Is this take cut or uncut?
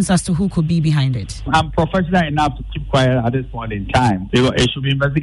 cut